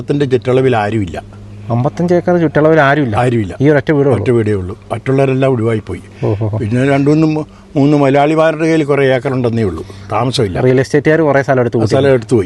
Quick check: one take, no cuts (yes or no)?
yes